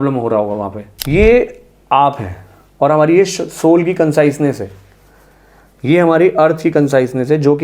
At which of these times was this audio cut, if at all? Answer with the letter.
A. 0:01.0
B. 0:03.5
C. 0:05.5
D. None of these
A